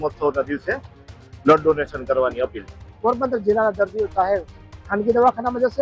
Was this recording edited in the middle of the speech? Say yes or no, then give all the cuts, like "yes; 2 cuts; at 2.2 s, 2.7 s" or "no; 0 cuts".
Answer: yes; 1 cut; at 2.8 s